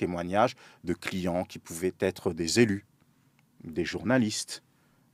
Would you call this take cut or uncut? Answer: uncut